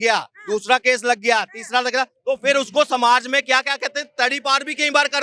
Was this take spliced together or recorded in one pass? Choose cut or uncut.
uncut